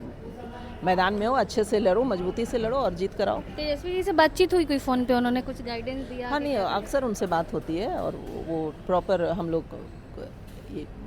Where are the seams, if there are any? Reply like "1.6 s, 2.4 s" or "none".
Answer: none